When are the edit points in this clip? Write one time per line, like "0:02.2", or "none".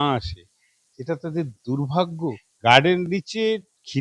0:02.5